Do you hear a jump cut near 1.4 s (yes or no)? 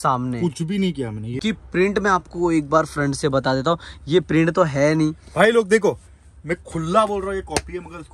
yes